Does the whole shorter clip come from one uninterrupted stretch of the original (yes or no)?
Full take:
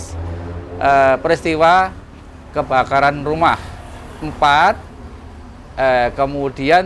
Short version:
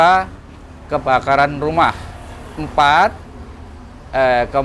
yes